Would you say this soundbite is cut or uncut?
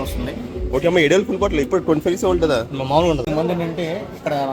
cut